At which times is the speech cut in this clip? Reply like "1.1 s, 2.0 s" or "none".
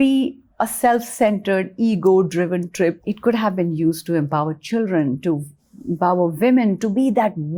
none